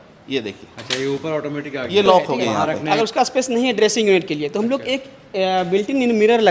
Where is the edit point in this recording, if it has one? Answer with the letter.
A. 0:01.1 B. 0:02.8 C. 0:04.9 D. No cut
B